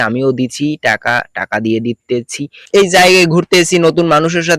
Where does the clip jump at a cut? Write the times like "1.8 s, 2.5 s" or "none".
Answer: 2.6 s